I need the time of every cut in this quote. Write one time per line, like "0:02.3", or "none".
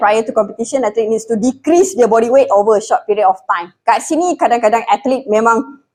none